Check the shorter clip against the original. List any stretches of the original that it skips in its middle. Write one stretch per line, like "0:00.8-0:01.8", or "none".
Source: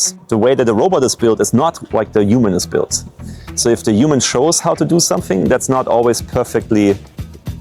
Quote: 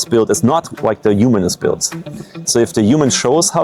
none